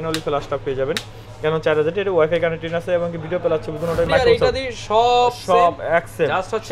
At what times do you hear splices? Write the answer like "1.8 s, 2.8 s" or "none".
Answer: 4.1 s